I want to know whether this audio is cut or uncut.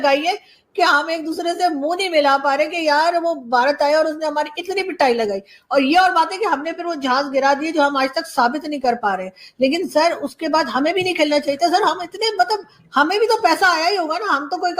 uncut